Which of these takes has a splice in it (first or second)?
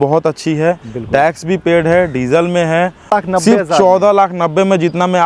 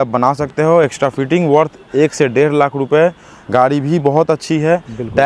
first